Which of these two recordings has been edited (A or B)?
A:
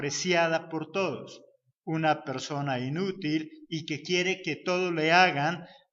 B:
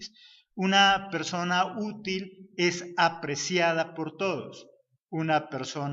A